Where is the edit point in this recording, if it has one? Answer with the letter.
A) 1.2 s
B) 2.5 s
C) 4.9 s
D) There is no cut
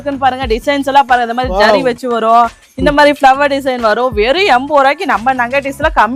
D